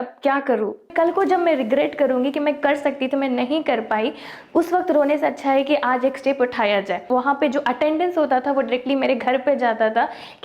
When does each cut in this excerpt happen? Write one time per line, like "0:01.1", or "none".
0:00.9
0:07.0